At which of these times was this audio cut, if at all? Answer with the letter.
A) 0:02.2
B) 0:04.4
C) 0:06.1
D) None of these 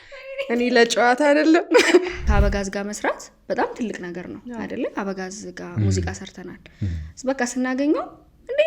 A